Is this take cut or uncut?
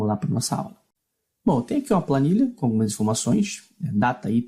cut